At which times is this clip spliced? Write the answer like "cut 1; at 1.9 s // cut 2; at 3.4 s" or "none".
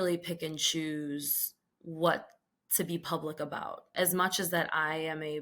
cut 1; at 3.9 s